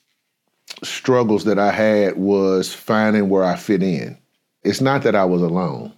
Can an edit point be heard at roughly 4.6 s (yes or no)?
yes